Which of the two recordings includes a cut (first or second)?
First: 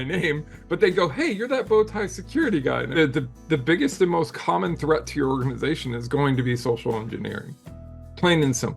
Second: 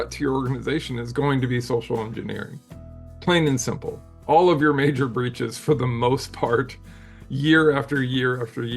first